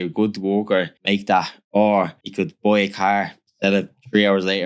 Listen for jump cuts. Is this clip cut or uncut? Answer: cut